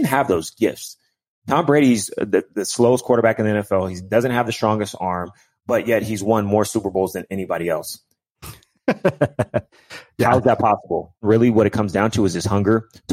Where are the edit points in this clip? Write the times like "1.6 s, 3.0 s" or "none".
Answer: 11.2 s